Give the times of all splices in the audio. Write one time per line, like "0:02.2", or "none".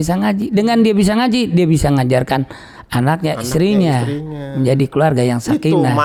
none